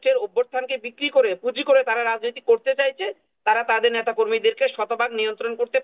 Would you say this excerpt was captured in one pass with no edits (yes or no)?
yes